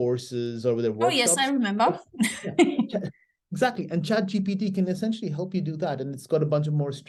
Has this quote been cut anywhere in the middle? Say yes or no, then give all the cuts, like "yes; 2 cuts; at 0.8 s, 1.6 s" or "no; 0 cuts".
no; 0 cuts